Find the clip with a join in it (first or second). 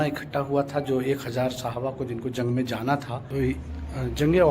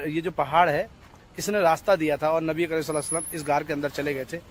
first